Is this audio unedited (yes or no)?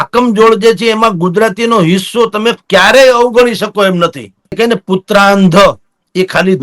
no